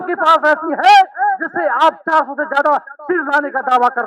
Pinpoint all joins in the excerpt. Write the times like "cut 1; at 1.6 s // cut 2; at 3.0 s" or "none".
none